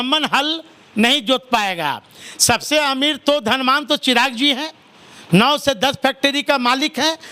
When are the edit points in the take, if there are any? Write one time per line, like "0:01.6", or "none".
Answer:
none